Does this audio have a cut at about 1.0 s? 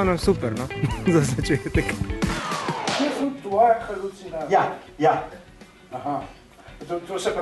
no; 1 cut; at 2.4 s

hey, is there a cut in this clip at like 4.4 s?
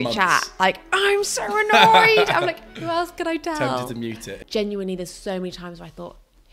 yes; 1 cut; at 4.4 s

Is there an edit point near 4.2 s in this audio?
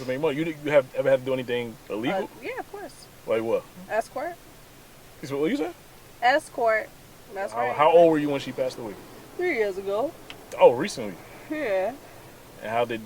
no; 1 cut; at 7.6 s

